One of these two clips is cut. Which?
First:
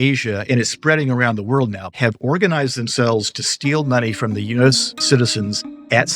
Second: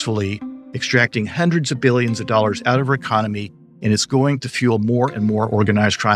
first; 2 cuts; at 1.9 s, 4.9 s

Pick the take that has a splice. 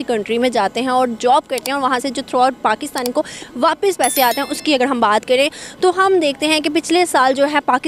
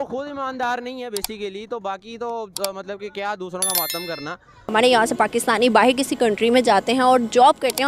second; 1 cut; at 4.7 s

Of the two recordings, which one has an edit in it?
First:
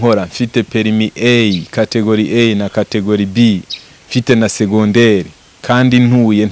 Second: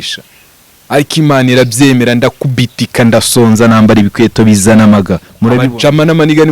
second; 1 cut; at 5.6 s

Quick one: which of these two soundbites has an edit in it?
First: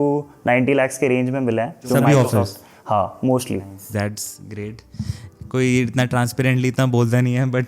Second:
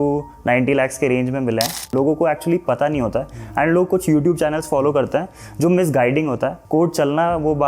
second; 2 cuts; at 1.9 s, 6.6 s

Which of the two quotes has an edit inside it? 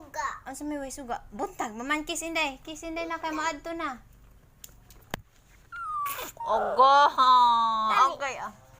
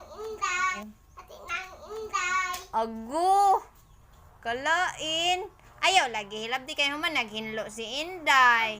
second; 2 cuts; at 0.8 s, 2.5 s

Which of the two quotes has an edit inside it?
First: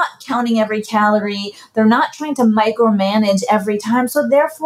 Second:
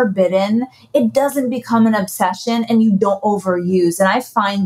second; 1 cut; at 3.0 s

